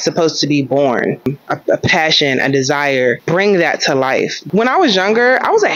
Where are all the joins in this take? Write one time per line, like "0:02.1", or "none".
0:01.3
0:03.2
0:04.4